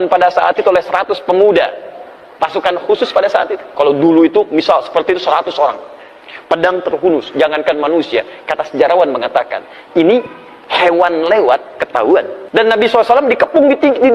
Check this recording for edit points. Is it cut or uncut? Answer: cut